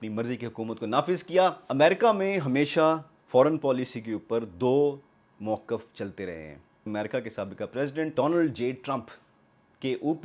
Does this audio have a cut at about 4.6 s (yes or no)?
no